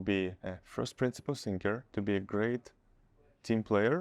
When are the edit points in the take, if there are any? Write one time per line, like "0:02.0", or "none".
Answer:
0:01.9